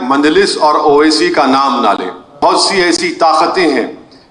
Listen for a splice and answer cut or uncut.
cut